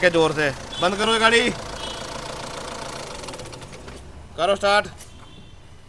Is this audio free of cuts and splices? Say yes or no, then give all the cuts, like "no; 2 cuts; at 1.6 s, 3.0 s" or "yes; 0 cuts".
yes; 0 cuts